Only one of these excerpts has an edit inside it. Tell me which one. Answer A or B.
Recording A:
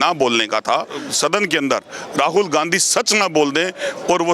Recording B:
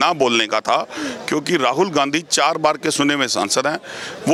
A